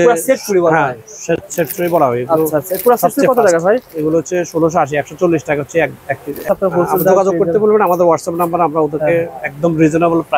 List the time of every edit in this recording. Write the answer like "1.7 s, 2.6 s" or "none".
6.5 s